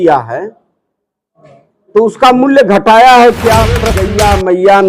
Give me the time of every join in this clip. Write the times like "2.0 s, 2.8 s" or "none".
4.0 s